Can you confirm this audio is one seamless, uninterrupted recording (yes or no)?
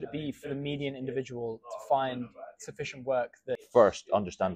no